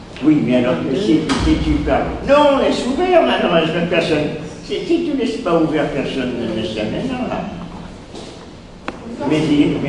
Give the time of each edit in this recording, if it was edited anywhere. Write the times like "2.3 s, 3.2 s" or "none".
none

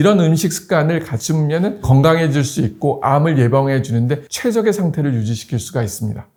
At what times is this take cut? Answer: none

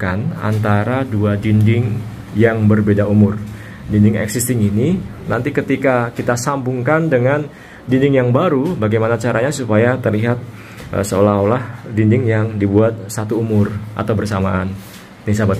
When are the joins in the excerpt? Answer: none

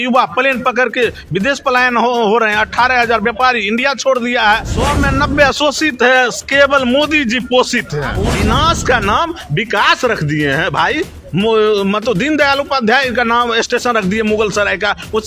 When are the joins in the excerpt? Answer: 4.7 s, 8.2 s

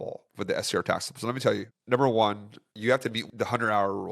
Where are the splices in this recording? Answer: 1.7 s, 3.2 s

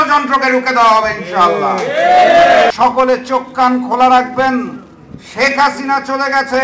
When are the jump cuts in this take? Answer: 2.7 s

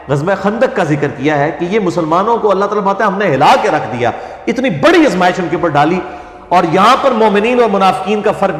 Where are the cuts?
none

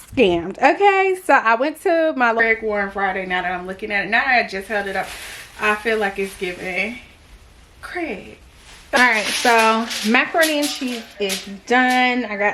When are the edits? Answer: 2.4 s, 9.0 s

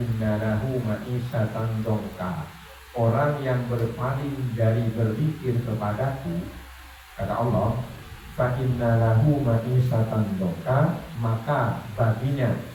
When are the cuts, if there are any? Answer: none

